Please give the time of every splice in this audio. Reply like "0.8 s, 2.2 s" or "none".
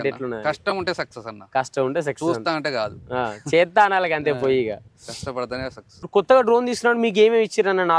none